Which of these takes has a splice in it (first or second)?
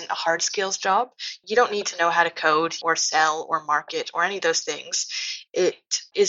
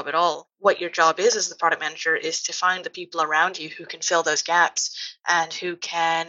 first